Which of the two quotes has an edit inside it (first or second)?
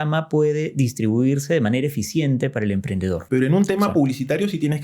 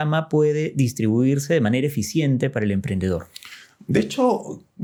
first